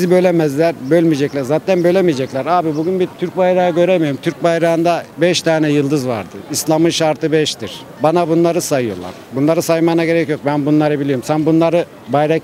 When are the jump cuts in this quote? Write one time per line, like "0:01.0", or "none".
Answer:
none